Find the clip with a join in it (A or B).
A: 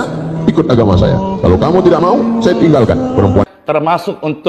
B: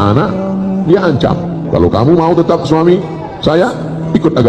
A